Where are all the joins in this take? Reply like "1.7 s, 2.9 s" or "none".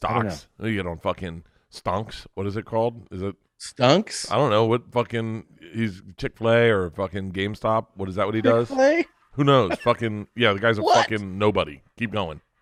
none